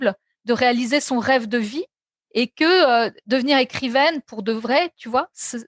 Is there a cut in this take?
no; 0 cuts

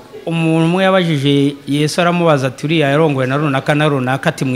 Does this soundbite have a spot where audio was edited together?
no; 0 cuts

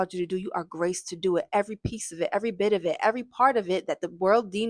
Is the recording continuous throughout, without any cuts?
yes; 0 cuts

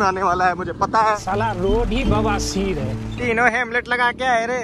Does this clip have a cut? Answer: yes; 2 cuts; at 1.2 s, 3.1 s

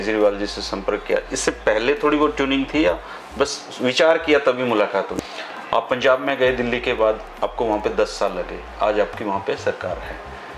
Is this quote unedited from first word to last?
no; 1 cut; at 5.1 s

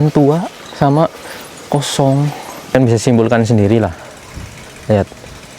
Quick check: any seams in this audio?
yes; 1 cut; at 2.7 s

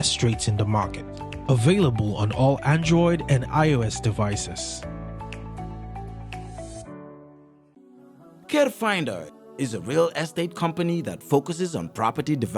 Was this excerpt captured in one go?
no; 1 cut; at 7.7 s

